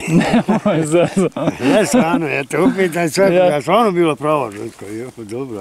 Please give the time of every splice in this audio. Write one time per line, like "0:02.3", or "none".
none